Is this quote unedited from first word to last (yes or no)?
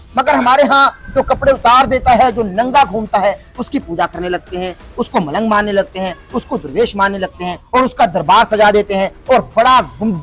yes